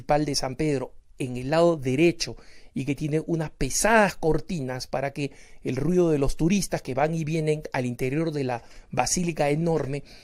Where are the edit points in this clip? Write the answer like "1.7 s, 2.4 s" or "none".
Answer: none